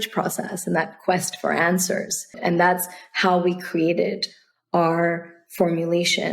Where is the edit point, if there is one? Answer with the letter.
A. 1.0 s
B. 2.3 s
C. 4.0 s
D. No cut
B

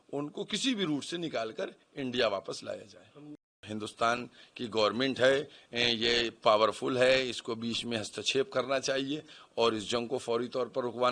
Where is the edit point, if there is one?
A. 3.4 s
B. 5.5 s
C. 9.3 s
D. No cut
A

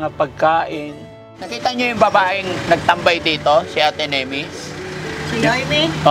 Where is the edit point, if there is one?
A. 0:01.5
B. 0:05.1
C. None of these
A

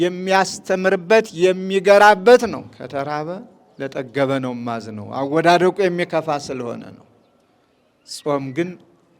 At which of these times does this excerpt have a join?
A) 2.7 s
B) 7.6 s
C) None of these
A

